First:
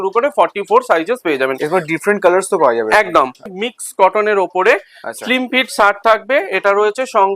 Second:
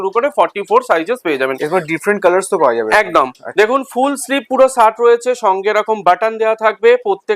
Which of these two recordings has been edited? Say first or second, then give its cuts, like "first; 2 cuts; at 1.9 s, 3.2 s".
first; 1 cut; at 3.5 s